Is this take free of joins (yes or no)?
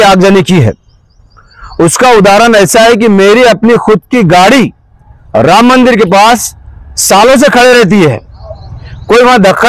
yes